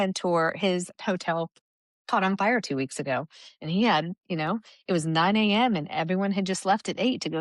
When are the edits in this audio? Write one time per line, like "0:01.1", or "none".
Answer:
0:00.9